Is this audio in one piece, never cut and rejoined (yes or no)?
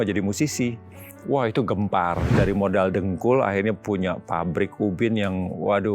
no